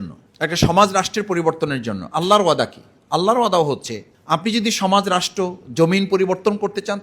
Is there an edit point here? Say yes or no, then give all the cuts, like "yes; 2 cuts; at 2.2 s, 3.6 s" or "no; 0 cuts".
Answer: no; 0 cuts